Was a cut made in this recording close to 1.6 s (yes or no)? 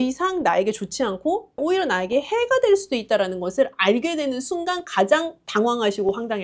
yes